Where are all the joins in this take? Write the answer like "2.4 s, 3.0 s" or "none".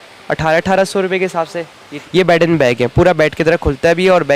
1.9 s